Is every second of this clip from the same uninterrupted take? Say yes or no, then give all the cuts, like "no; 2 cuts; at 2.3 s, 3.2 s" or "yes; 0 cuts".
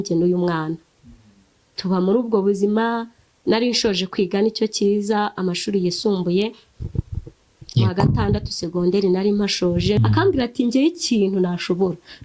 no; 1 cut; at 10.0 s